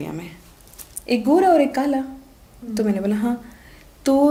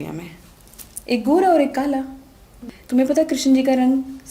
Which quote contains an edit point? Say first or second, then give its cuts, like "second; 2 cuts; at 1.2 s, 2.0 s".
second; 1 cut; at 2.6 s